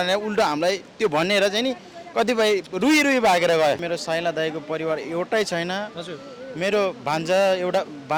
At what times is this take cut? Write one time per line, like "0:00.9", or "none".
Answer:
0:03.8